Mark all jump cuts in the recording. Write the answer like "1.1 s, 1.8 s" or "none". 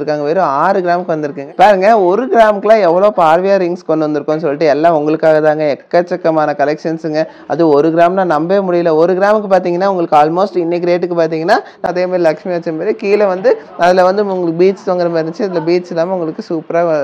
1.4 s, 11.9 s